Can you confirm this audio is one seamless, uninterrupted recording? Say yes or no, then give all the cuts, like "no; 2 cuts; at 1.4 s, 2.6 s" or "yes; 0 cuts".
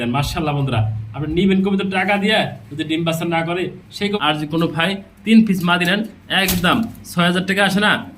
no; 1 cut; at 4.2 s